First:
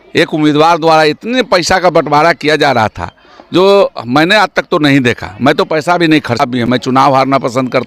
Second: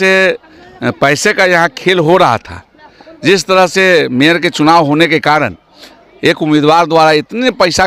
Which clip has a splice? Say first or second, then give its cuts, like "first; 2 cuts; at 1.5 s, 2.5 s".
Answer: first; 1 cut; at 6.4 s